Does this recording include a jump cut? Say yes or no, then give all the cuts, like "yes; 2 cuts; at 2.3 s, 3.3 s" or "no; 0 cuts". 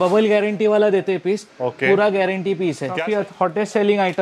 yes; 1 cut; at 3.0 s